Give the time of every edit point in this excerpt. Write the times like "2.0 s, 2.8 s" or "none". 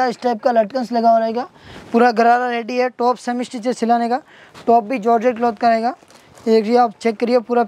none